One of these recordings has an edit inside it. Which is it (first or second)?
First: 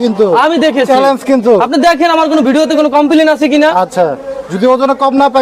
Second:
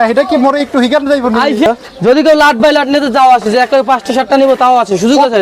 second